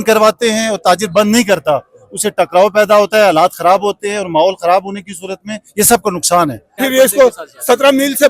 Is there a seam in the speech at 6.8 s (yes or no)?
yes